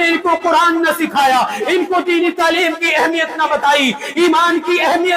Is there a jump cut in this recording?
no; 0 cuts

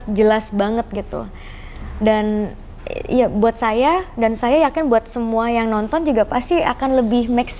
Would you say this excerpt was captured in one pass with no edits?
yes; 0 cuts

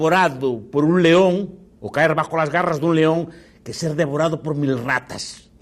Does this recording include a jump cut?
no; 0 cuts

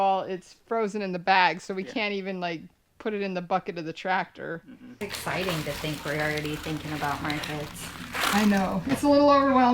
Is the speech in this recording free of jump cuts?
no; 1 cut; at 4.8 s

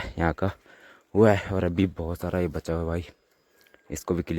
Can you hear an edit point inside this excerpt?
no; 0 cuts

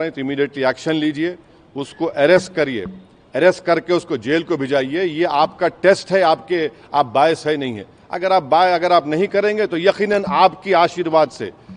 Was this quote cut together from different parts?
no; 0 cuts

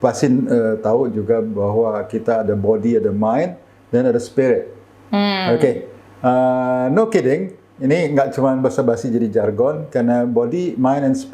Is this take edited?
no; 0 cuts

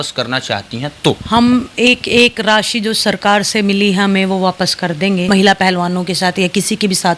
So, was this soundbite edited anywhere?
yes; 2 cuts; at 1.2 s, 5.2 s

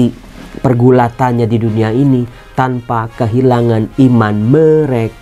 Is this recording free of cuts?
yes; 0 cuts

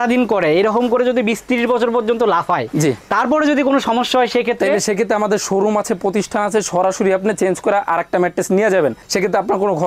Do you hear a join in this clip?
no; 0 cuts

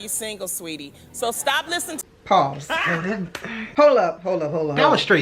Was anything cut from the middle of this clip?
yes; 1 cut; at 2.0 s

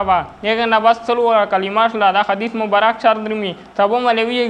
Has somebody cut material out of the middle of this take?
no; 0 cuts

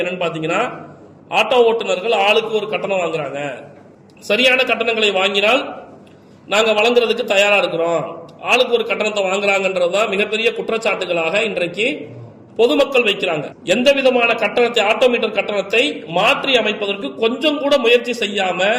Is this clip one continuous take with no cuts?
no; 1 cut; at 13.5 s

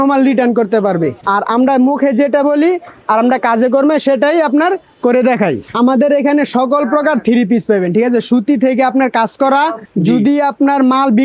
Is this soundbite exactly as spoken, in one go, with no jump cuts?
no; 3 cuts; at 1.2 s, 5.6 s, 9.9 s

